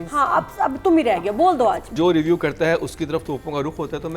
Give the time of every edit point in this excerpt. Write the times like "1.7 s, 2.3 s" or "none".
1.9 s